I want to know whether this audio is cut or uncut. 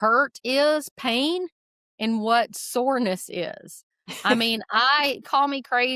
uncut